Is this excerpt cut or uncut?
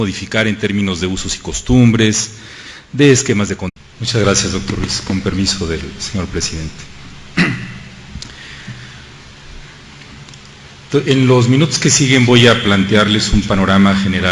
uncut